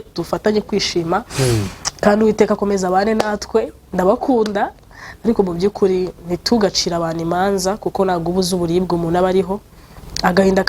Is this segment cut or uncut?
uncut